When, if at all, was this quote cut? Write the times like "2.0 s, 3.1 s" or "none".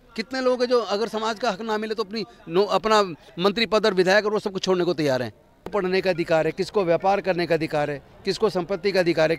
5.7 s